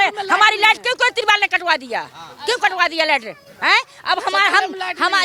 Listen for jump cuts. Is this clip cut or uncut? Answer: uncut